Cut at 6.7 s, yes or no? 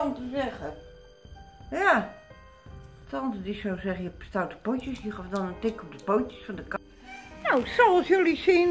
yes